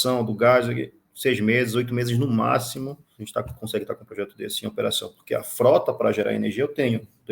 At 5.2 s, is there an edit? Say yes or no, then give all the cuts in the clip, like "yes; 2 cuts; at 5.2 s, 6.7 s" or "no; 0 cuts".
no; 1 cut; at 3.1 s